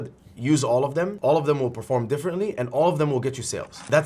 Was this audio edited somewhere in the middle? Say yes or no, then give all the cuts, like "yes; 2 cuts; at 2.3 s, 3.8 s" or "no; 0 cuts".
yes; 1 cut; at 1.1 s